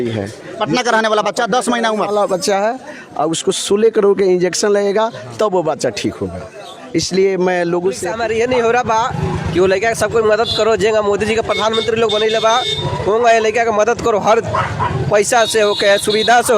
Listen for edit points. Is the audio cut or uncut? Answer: cut